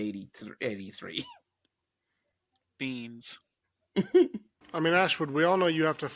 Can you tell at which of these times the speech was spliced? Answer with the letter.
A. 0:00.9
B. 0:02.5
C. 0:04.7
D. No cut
D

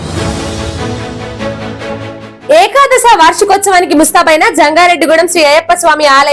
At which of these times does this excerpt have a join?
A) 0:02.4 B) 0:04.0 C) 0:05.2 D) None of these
A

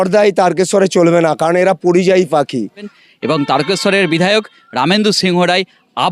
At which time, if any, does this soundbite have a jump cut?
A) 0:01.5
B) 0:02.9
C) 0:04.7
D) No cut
B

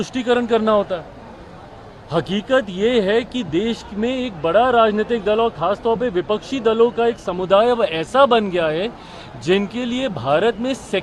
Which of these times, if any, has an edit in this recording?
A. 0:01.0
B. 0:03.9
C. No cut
C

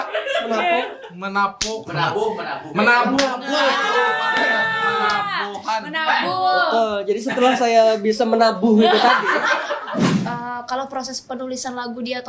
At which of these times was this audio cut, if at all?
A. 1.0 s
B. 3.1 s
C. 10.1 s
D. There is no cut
C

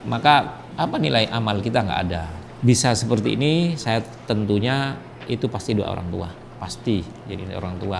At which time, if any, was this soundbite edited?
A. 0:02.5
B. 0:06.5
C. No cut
C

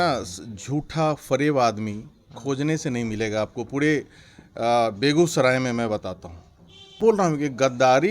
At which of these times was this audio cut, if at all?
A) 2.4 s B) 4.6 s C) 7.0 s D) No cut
C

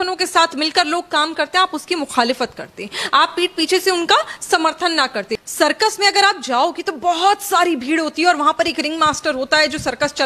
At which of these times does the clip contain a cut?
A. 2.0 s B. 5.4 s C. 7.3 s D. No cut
B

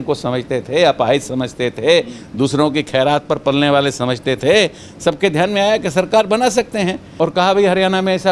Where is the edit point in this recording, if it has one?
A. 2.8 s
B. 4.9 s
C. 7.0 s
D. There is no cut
C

